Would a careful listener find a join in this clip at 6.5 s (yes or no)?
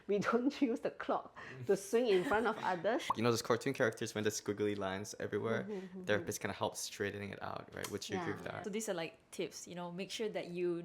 no